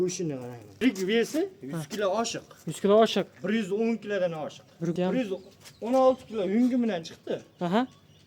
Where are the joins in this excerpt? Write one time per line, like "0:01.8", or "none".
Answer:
0:00.8
0:04.9